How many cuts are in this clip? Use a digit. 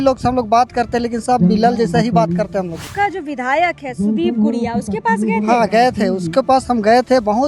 1